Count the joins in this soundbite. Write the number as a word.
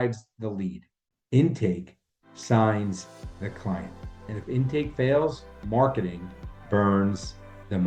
zero